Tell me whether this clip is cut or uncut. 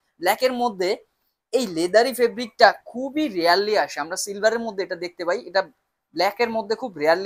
uncut